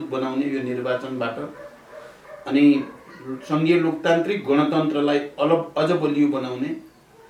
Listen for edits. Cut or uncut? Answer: uncut